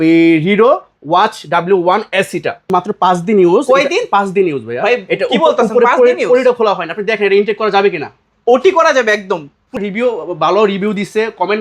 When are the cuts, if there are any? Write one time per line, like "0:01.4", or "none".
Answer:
0:02.7
0:09.8